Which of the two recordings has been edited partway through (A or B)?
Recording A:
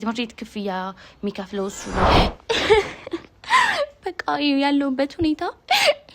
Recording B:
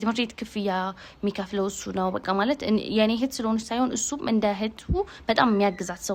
A